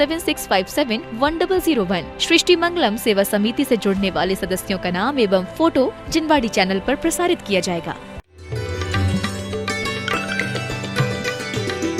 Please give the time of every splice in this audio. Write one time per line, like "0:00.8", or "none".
0:08.2